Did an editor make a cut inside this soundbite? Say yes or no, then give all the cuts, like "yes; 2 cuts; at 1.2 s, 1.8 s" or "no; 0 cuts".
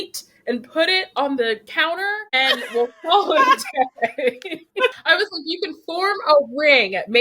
yes; 1 cut; at 5.0 s